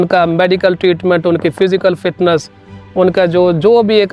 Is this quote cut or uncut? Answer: uncut